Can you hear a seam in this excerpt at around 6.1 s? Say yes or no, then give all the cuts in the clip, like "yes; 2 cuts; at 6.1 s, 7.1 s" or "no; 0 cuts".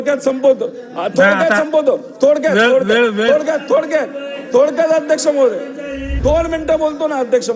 yes; 1 cut; at 6.1 s